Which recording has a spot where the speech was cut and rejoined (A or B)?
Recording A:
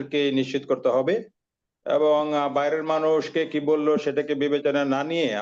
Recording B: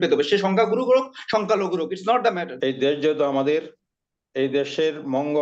B